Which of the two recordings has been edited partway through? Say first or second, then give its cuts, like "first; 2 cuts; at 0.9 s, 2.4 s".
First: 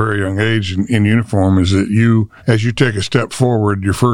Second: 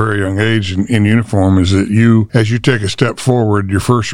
second; 1 cut; at 2.3 s